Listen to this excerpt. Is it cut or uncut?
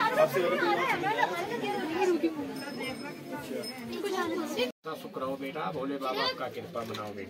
cut